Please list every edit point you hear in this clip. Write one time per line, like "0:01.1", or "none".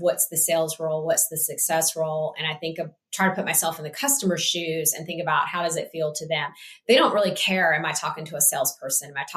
none